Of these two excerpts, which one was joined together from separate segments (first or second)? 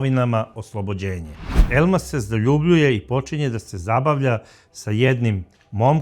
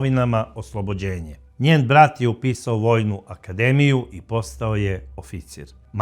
first